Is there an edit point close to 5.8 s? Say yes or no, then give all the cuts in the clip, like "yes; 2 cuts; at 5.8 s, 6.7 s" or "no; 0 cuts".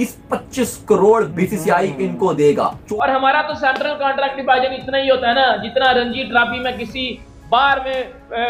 no; 1 cut; at 2.8 s